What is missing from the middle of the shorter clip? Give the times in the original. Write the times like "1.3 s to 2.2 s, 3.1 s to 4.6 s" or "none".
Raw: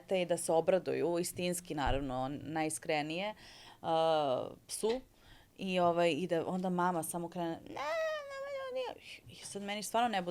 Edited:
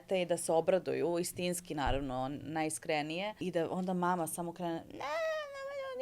3.4 s to 6.2 s